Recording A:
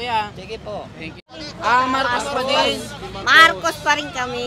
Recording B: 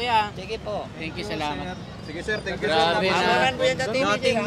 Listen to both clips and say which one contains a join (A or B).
A